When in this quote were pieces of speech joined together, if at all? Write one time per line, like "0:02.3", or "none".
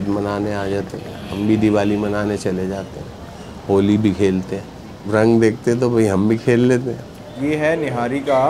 0:07.3